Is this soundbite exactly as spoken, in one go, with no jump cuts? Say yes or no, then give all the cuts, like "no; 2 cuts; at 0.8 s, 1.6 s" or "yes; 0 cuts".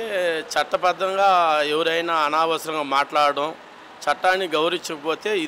yes; 0 cuts